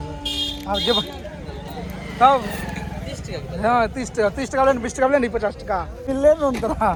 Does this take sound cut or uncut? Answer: uncut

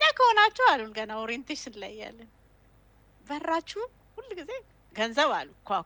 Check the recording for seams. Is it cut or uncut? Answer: uncut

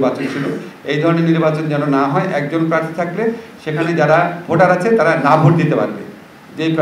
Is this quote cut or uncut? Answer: uncut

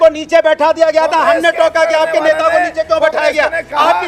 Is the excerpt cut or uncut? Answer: uncut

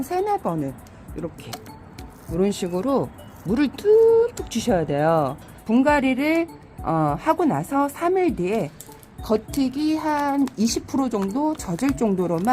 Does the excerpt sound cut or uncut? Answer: cut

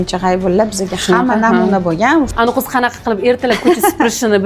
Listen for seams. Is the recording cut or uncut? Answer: cut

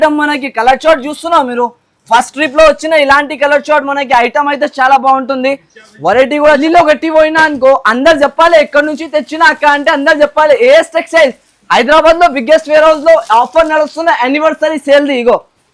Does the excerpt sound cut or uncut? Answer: cut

